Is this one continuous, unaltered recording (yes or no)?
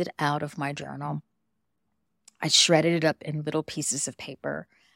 yes